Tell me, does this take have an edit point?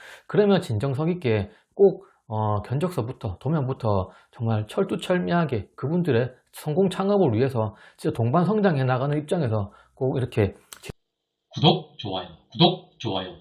yes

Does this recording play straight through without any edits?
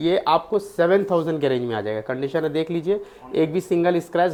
yes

